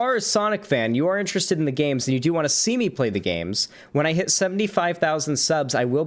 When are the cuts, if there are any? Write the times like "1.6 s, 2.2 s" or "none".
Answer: none